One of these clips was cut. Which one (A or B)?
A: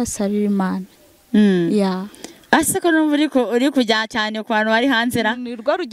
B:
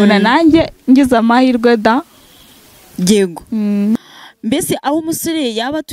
B